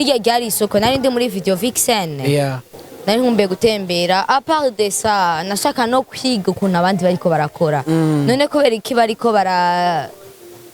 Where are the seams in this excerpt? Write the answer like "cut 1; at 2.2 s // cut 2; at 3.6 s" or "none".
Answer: cut 1; at 2.7 s